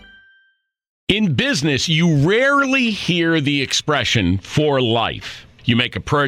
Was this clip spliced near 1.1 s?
yes; 1 cut; at 1.1 s

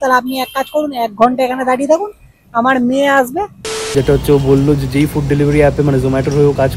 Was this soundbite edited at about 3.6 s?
yes; 1 cut; at 3.6 s

